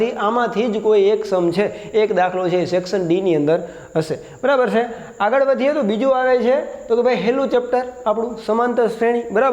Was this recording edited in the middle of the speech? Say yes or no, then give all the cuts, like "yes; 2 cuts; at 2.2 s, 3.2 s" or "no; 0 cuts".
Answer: no; 0 cuts